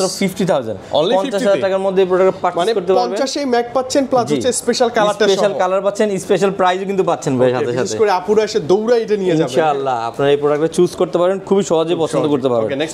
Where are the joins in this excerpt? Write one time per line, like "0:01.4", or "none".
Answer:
none